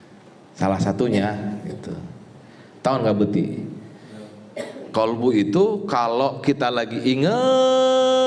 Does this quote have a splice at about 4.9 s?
yes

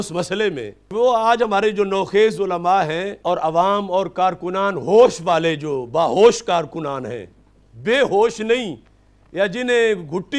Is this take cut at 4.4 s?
no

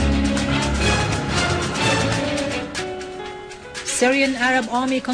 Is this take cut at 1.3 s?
no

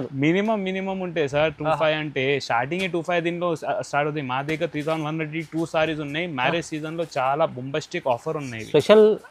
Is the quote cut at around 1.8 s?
no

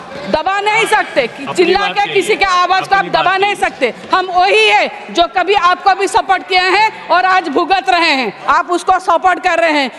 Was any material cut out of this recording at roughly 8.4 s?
yes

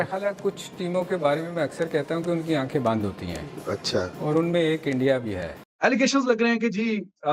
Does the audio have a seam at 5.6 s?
yes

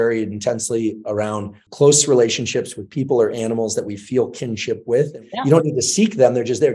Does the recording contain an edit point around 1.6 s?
yes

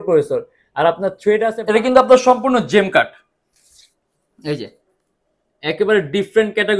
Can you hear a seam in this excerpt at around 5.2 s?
no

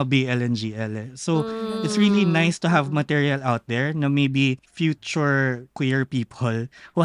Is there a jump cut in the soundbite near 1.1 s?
no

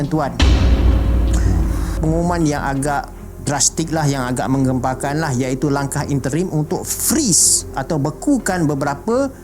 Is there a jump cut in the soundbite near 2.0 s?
yes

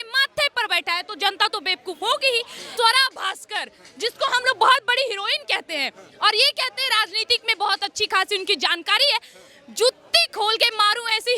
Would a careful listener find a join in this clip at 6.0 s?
no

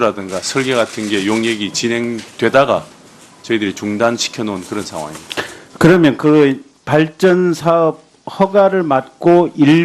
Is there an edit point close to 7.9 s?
no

